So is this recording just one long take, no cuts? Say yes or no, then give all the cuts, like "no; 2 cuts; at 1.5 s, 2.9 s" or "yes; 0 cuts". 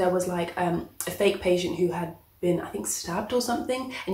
yes; 0 cuts